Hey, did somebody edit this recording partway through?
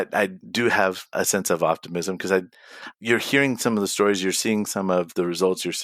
yes; 1 cut; at 1.1 s

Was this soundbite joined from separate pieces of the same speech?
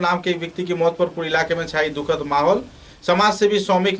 no; 0 cuts

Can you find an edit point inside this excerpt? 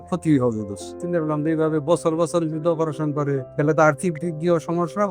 yes; 2 cuts; at 1.0 s, 3.5 s

